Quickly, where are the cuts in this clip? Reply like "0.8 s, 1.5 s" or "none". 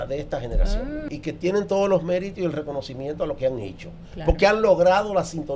1.1 s